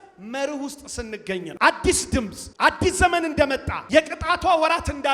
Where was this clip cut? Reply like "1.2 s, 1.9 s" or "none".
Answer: 1.5 s, 2.4 s, 3.7 s